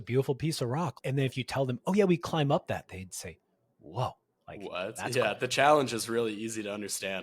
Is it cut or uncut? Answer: cut